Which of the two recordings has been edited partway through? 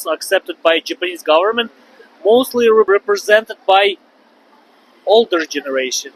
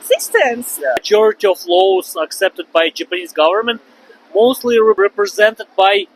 second; 1 cut; at 1.0 s

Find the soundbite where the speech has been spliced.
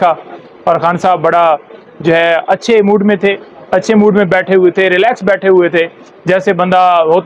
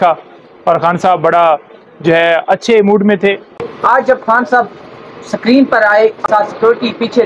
second; 2 cuts; at 3.5 s, 6.2 s

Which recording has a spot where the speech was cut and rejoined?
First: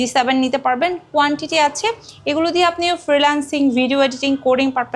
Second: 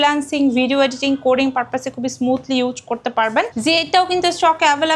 second; 1 cut; at 3.5 s

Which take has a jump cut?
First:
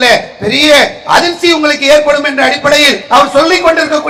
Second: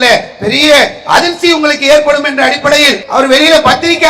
second; 1 cut; at 3.0 s

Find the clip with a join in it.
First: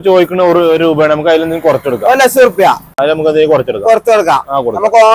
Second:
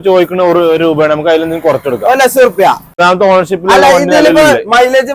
second; 1 cut; at 2.9 s

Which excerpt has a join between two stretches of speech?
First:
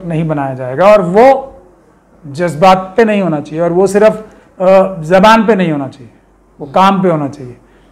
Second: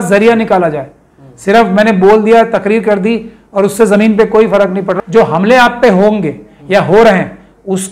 second; 1 cut; at 4.9 s

